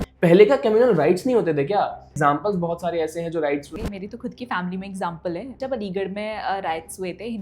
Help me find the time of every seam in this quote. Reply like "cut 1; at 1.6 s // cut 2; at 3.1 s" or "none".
cut 1; at 2.2 s // cut 2; at 3.7 s // cut 3; at 5.6 s